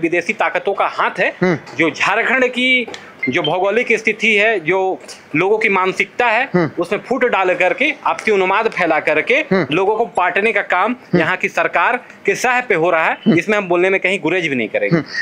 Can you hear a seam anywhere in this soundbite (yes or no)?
no